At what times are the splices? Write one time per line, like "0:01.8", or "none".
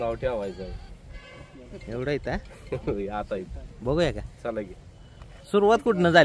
none